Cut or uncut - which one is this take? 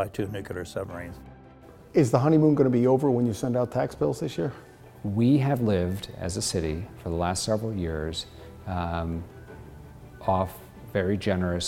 cut